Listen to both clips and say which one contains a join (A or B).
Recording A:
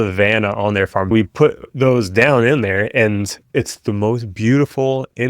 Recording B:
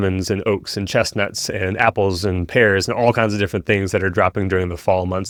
A